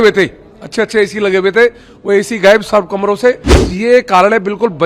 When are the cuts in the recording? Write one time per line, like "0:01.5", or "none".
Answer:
0:03.6